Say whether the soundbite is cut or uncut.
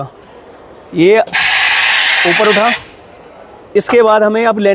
uncut